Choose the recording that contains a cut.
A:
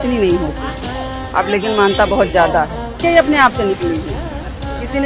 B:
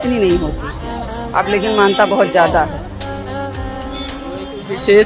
A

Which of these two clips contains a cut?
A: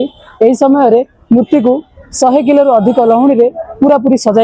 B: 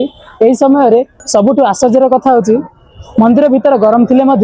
B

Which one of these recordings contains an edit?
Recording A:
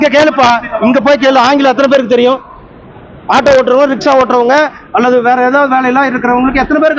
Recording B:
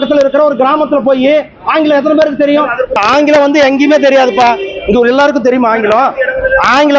B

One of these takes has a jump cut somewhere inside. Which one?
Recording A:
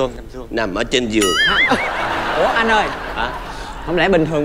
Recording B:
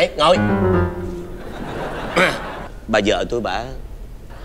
B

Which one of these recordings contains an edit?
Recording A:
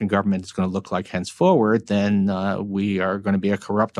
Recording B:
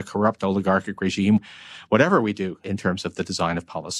B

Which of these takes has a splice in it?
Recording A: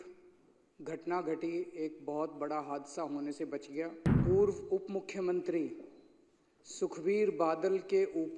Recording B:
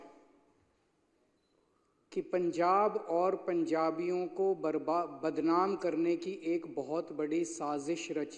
A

